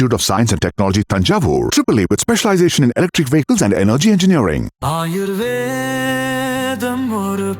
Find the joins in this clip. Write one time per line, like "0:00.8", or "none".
none